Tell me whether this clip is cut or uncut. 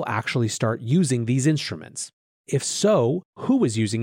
cut